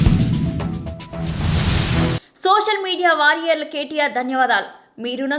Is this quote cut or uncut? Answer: cut